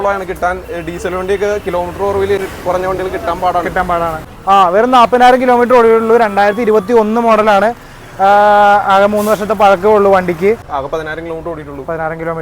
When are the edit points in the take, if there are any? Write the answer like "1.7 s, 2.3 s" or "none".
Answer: 2.4 s, 4.3 s, 10.7 s